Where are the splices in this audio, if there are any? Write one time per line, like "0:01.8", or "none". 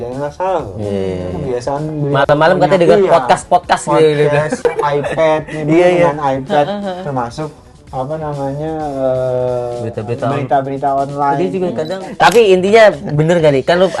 0:12.1